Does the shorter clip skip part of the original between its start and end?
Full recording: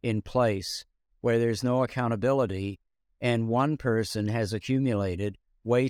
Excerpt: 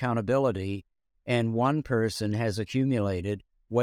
no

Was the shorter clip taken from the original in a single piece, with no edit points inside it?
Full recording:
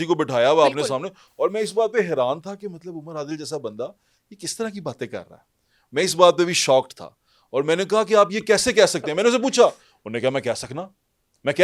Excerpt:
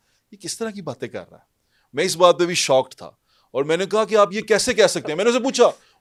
yes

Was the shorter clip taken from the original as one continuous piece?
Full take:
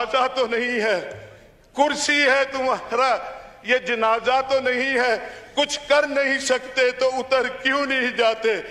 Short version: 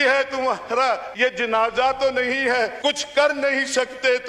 no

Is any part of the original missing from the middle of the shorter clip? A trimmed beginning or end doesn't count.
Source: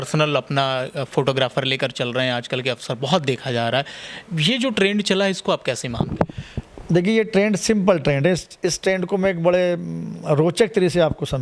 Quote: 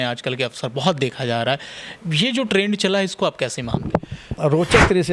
yes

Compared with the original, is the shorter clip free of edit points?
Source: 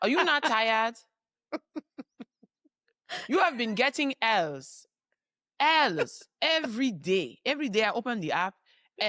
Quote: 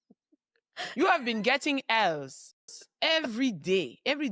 no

